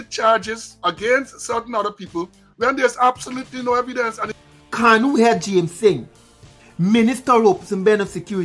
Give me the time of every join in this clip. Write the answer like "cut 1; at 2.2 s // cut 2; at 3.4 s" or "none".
cut 1; at 4.3 s